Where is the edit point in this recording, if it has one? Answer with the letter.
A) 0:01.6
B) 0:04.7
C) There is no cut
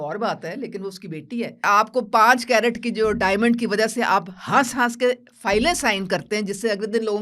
A